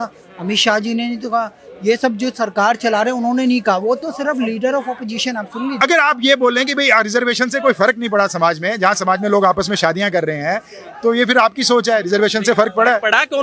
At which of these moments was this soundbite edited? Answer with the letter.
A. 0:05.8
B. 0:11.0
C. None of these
A